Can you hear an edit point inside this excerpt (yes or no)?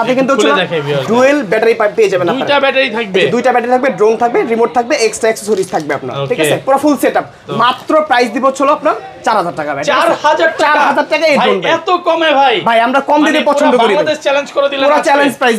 no